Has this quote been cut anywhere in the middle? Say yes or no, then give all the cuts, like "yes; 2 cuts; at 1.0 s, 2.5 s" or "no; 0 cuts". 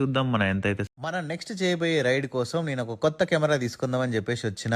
yes; 1 cut; at 0.9 s